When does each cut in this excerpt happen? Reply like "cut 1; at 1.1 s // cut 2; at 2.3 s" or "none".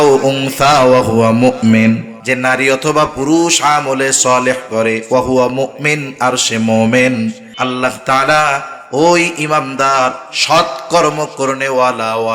cut 1; at 2.1 s // cut 2; at 7.5 s